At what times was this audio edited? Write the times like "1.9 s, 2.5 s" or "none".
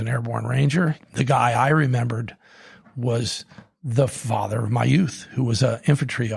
1.0 s